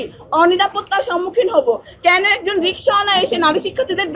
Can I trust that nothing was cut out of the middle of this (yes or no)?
yes